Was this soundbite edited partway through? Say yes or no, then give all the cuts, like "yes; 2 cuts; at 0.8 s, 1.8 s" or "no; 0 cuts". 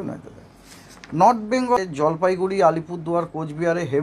yes; 1 cut; at 1.8 s